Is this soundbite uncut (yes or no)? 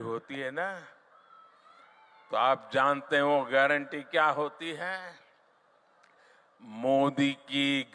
yes